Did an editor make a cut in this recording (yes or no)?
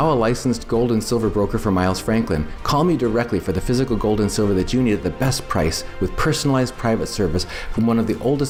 no